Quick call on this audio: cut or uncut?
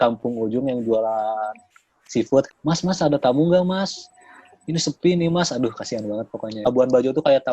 cut